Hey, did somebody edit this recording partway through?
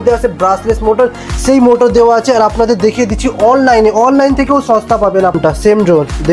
yes; 1 cut; at 5.4 s

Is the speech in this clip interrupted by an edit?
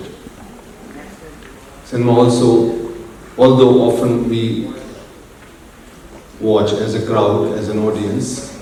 no; 0 cuts

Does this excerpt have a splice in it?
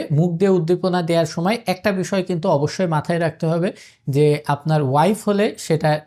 no; 0 cuts

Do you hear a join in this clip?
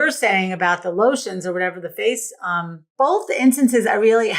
yes; 1 cut; at 2.8 s

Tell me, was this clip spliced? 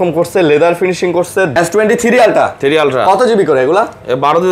yes; 1 cut; at 1.5 s

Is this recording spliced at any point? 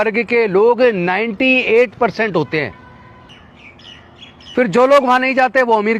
yes; 1 cut; at 3.3 s

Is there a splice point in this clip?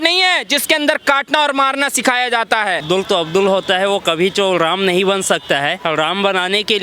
yes; 2 cuts; at 2.8 s, 5.8 s

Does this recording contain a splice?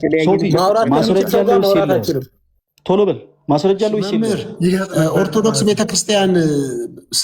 yes; 1 cut; at 4.1 s

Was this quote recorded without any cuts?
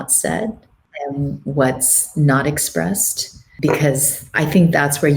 no; 2 cuts; at 0.9 s, 3.5 s

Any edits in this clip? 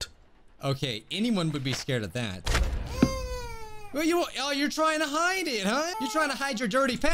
yes; 1 cut; at 5.9 s

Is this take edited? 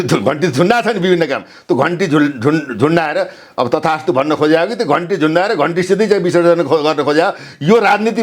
no; 0 cuts

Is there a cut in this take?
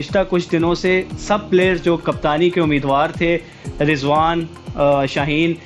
no; 0 cuts

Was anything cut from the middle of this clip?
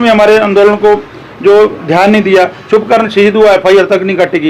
no; 0 cuts

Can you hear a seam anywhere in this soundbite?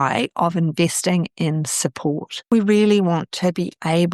yes; 1 cut; at 2.4 s

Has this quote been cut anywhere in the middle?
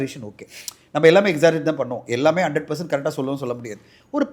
no; 0 cuts

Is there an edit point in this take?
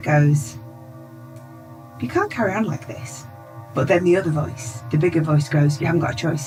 no; 0 cuts

